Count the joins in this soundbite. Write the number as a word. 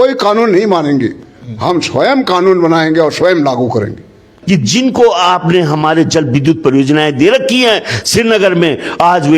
one